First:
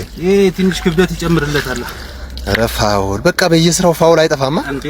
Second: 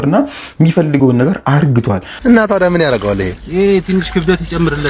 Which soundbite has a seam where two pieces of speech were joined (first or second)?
second